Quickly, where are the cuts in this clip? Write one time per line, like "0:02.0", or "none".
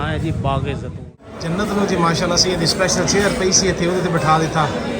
0:01.0